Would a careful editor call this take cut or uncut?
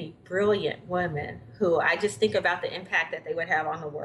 uncut